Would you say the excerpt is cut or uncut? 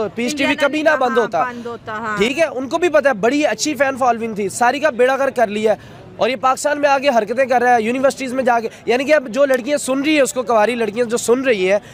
uncut